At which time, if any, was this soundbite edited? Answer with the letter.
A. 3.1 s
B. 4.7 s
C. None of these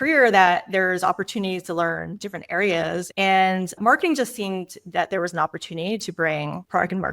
A